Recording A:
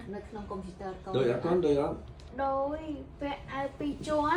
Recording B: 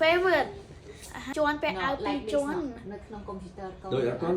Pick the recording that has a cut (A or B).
B